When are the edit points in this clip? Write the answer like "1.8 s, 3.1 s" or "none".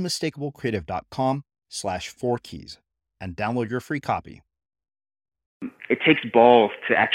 5.8 s

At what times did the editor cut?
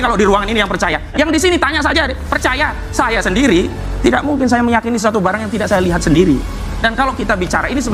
none

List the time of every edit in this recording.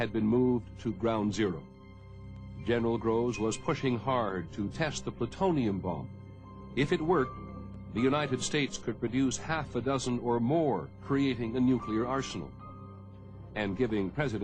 none

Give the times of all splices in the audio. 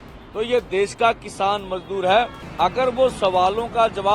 2.4 s

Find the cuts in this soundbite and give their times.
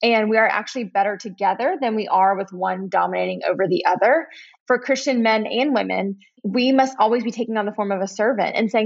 4.5 s

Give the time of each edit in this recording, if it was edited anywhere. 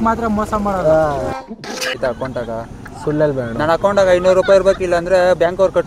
2.0 s

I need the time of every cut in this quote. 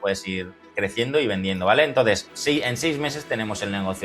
2.3 s

